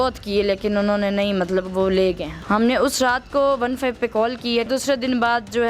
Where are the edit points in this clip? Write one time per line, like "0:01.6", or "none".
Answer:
0:02.4
0:04.7